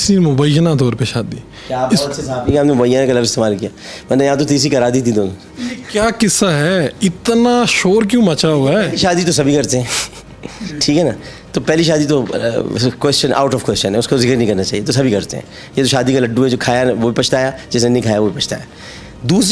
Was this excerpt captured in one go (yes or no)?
yes